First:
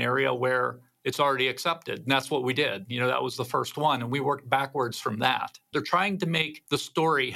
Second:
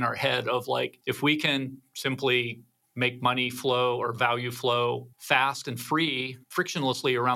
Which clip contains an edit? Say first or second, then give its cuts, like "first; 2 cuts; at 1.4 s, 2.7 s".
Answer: first; 1 cut; at 5.7 s